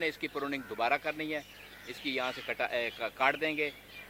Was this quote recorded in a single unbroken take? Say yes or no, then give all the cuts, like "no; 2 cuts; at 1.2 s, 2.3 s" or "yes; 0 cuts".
yes; 0 cuts